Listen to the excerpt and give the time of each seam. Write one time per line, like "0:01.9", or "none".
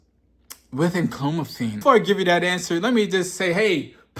0:01.8